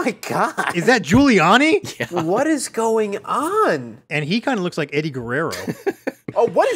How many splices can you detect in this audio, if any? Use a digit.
3